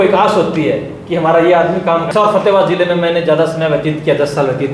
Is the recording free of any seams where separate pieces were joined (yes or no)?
no